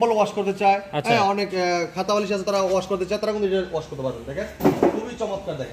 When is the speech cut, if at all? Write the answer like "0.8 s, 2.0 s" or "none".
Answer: none